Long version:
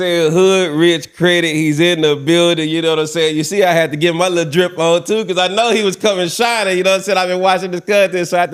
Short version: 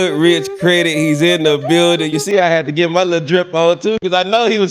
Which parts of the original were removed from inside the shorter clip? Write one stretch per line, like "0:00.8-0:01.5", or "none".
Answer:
0:02.7-0:03.3